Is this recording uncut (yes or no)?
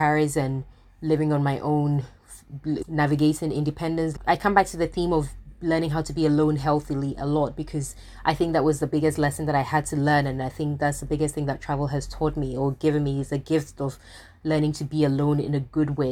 yes